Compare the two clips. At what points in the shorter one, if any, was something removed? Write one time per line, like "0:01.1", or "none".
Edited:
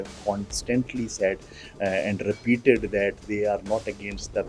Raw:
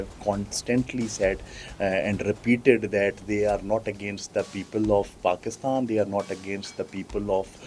none